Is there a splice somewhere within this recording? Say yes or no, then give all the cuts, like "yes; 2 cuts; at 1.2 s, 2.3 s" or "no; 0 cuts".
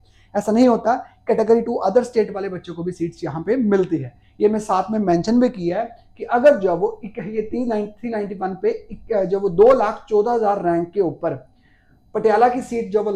no; 0 cuts